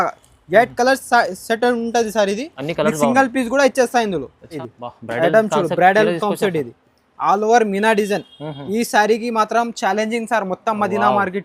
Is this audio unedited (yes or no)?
no